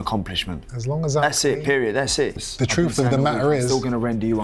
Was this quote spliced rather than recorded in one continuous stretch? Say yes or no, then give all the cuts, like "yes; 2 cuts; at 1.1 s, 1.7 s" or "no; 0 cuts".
yes; 1 cut; at 2.4 s